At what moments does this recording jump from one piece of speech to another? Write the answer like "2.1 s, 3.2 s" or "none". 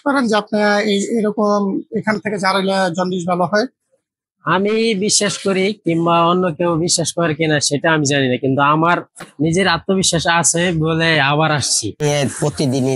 11.9 s

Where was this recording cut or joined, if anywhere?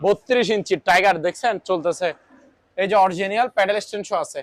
none

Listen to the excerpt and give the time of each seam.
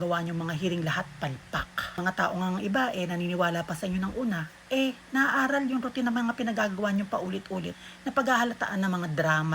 2.0 s, 7.8 s

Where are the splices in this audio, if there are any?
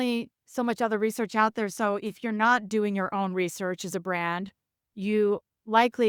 none

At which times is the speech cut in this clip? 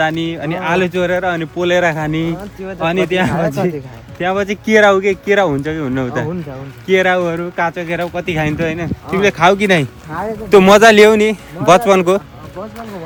none

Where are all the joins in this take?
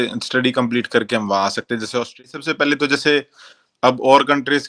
2.2 s

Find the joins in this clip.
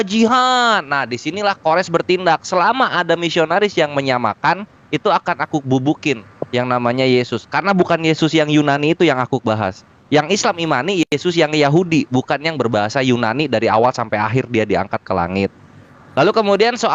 none

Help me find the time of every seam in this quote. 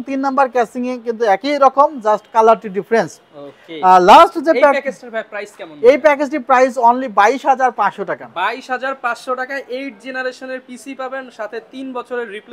none

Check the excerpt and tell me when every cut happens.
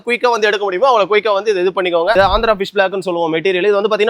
2.2 s

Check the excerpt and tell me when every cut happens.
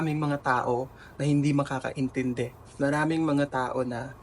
2.6 s

